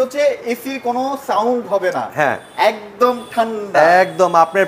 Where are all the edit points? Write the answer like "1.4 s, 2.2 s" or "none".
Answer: none